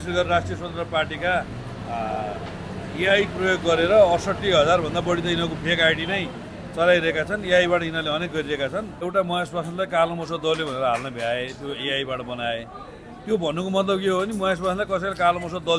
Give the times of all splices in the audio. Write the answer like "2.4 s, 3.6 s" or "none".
9.1 s